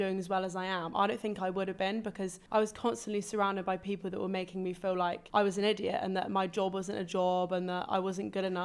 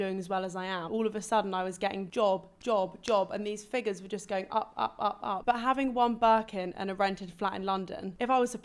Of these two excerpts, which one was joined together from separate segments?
second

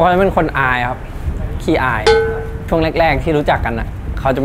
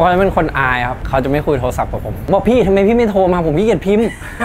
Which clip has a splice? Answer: second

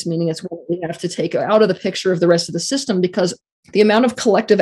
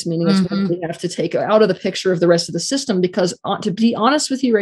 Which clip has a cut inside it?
first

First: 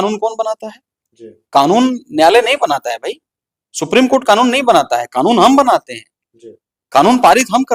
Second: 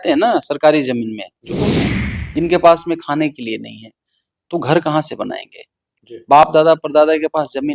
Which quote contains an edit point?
second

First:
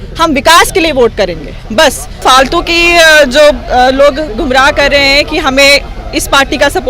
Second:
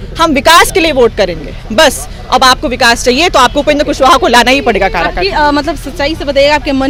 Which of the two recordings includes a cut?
first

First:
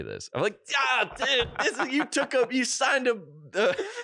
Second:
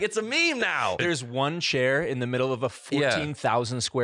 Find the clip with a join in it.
second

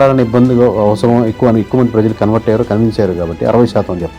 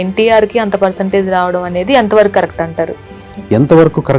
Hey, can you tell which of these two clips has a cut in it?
second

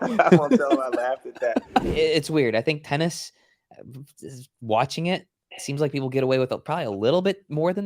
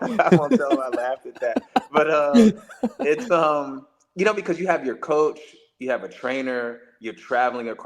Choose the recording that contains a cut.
first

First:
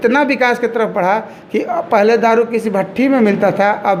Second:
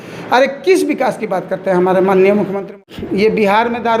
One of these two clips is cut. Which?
second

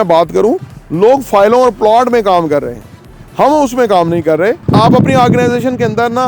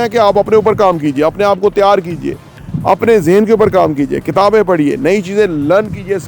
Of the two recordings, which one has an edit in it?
first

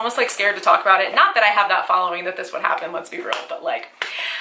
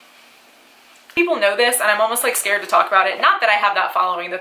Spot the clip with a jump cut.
second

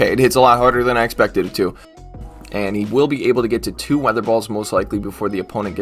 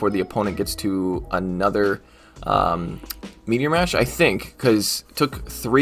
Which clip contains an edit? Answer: first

